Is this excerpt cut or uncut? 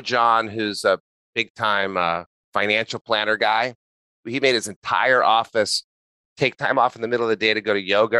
cut